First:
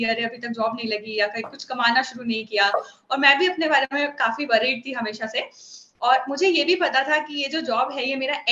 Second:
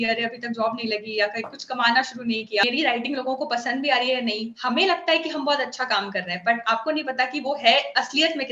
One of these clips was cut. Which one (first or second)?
second